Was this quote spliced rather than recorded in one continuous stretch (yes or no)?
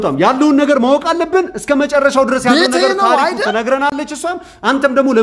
no